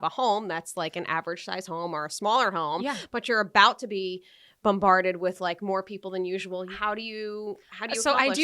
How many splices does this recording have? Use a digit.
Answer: 1